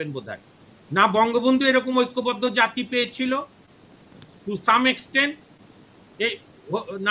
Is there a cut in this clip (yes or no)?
no